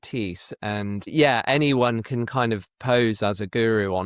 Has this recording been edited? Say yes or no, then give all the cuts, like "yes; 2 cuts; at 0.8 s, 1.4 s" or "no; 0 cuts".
yes; 1 cut; at 1.1 s